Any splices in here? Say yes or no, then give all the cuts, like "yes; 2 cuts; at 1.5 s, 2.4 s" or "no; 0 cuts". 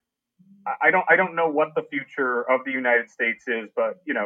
no; 0 cuts